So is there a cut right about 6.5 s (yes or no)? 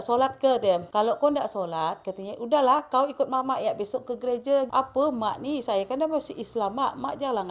no